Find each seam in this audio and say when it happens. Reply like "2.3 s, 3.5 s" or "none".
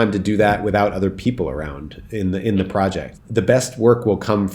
3.1 s